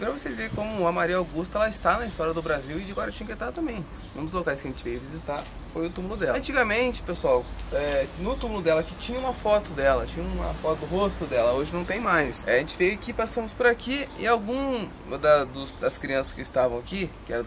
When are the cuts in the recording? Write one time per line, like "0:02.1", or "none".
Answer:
0:06.4
0:12.4